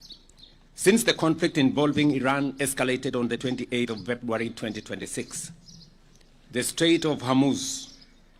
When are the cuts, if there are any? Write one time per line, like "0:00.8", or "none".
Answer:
none